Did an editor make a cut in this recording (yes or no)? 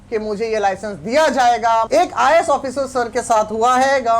yes